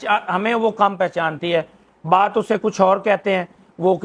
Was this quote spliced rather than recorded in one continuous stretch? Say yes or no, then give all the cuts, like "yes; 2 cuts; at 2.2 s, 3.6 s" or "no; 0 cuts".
no; 0 cuts